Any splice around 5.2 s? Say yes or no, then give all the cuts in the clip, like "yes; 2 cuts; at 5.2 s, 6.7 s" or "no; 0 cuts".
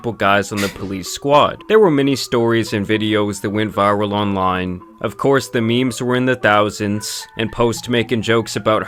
no; 0 cuts